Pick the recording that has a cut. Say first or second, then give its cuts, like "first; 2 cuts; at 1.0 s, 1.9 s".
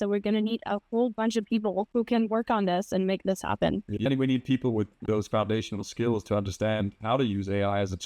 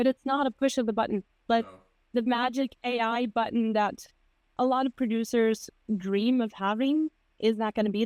first; 3 cuts; at 1.9 s, 4.0 s, 5.0 s